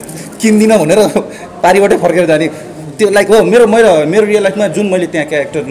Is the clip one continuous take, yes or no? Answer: yes